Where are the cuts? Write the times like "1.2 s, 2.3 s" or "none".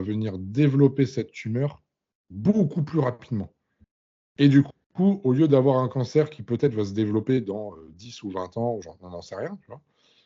none